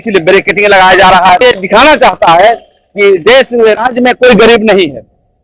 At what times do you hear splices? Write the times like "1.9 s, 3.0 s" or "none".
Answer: 1.4 s